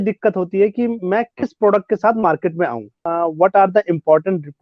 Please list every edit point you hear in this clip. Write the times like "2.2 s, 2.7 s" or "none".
3.0 s

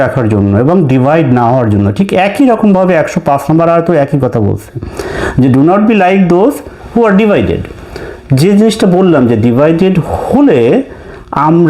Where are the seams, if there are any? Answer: none

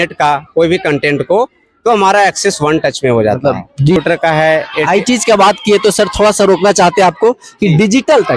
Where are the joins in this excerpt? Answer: 4.0 s

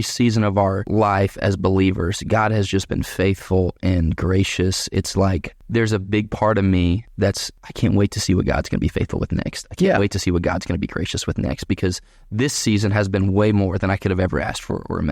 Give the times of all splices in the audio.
0.8 s, 5.5 s, 7.2 s

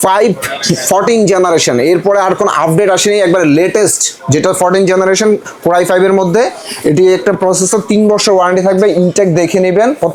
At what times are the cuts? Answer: none

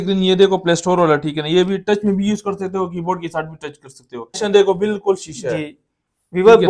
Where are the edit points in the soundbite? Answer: 4.4 s

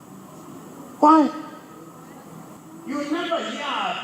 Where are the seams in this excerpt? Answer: 2.6 s

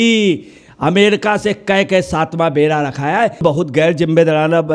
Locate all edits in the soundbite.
3.4 s

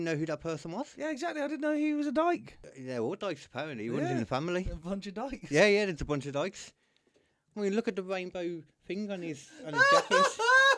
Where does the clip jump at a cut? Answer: 2.6 s

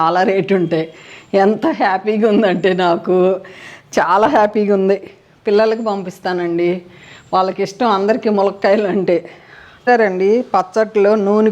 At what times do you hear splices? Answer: 9.8 s

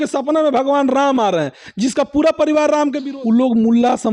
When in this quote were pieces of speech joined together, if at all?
3.0 s

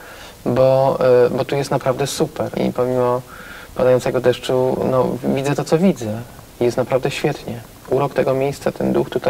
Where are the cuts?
2.6 s

